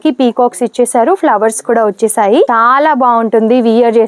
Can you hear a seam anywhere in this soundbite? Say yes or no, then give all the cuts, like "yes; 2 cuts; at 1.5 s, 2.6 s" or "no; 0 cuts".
yes; 1 cut; at 2.5 s